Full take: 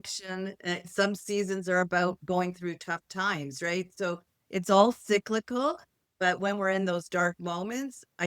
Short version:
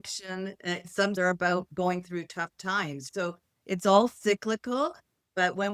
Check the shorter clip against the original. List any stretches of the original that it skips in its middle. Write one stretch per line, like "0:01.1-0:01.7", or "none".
0:01.1-0:01.7
0:03.6-0:03.9